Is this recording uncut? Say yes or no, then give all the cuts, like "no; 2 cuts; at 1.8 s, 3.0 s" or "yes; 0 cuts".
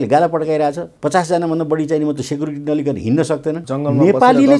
no; 2 cuts; at 0.9 s, 3.6 s